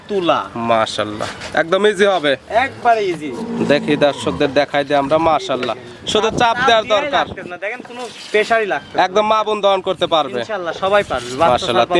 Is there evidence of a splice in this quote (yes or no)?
no